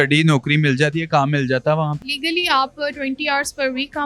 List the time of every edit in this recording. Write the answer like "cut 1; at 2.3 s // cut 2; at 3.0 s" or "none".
cut 1; at 2.1 s